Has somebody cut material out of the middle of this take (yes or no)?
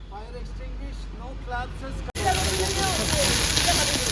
yes